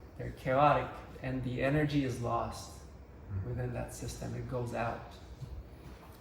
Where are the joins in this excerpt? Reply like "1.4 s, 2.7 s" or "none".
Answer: none